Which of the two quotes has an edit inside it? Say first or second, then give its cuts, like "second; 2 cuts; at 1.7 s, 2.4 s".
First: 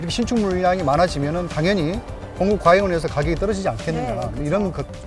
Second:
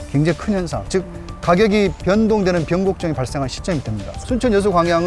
second; 1 cut; at 4.1 s